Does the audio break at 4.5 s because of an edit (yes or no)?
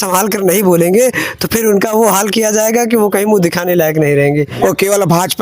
yes